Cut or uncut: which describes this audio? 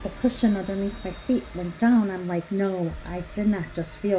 cut